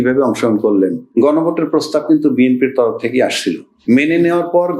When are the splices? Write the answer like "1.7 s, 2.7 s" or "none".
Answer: 1.0 s, 3.7 s

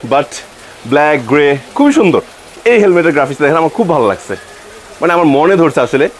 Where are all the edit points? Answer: 2.6 s

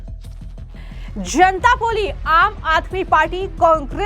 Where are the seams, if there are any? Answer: 1.1 s

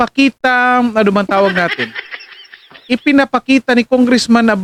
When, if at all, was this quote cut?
none

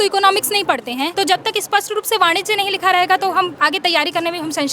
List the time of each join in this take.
1.1 s, 3.5 s

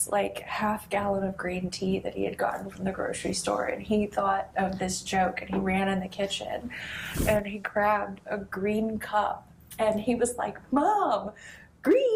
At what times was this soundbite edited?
none

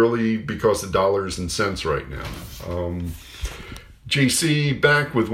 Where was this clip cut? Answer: none

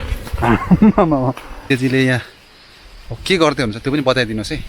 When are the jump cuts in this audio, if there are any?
1.5 s

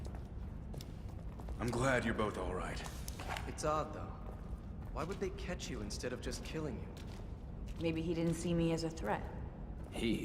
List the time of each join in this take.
8.4 s

